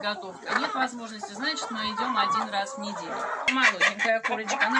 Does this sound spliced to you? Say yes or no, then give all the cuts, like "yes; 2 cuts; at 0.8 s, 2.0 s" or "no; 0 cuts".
yes; 1 cut; at 3.5 s